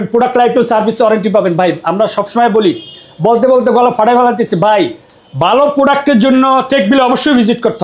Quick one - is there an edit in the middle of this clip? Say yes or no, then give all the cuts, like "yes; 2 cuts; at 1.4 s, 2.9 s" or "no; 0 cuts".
no; 0 cuts